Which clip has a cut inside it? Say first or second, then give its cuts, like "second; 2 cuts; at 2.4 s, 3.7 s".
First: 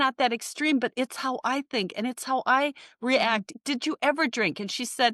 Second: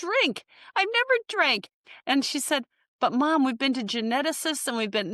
first; 1 cut; at 3.5 s